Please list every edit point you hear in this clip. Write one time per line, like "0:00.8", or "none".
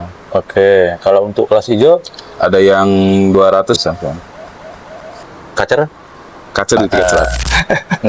0:06.9